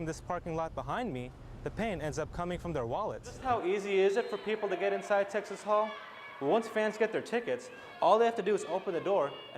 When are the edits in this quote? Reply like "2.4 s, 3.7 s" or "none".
3.4 s

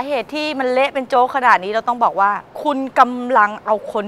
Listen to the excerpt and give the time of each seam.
2.5 s

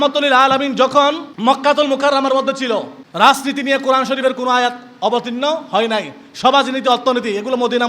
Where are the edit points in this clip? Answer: 1.3 s, 3.0 s

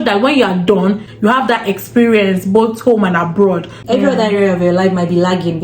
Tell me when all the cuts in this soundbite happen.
1.2 s, 3.8 s

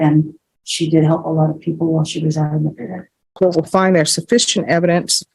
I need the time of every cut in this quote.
3.3 s

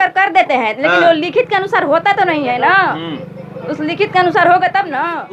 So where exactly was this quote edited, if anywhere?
none

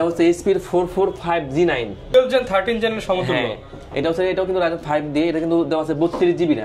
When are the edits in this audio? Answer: 2.1 s

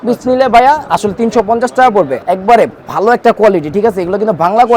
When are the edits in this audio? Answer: 2.2 s

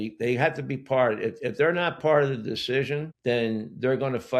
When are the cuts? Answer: 3.1 s

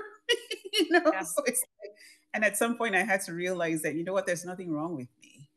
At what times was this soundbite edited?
none

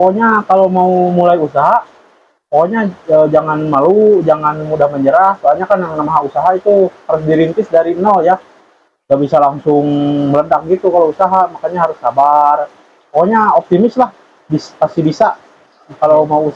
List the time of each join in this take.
none

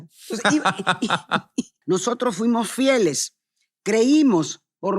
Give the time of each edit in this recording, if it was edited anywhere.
1.8 s

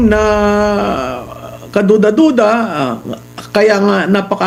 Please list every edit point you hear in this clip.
none

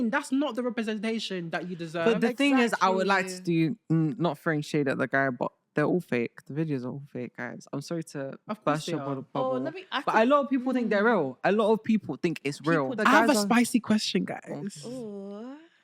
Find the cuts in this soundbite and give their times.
13.0 s

